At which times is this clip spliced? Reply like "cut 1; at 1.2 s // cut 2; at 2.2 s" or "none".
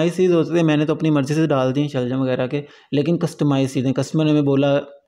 none